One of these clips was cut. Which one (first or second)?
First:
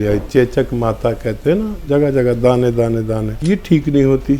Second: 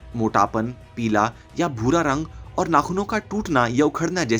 first